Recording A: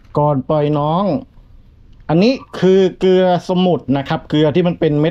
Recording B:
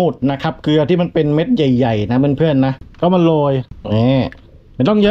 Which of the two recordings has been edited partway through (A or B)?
B